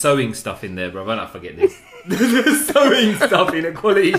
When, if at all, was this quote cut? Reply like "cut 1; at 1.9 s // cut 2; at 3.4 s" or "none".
none